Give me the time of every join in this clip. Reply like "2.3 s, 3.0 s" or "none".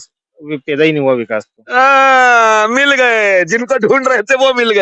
none